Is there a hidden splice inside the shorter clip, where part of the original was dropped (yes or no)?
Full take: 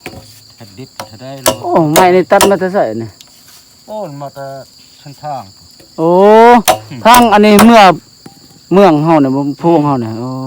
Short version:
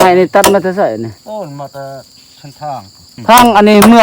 yes